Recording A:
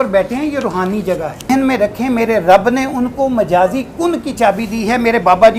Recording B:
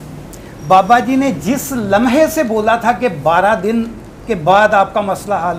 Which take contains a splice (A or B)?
A